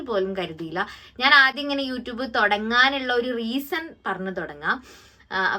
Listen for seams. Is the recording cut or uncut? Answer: uncut